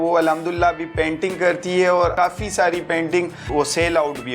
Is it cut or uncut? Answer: cut